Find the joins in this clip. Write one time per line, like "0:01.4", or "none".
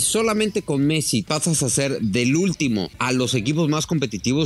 0:01.3
0:02.9